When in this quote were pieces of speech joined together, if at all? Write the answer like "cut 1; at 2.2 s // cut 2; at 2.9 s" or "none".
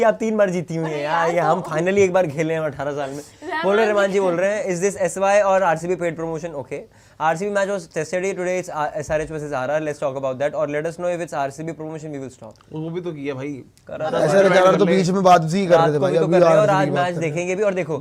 none